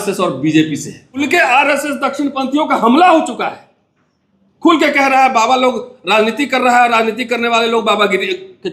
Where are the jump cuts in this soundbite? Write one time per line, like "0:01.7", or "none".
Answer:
0:01.2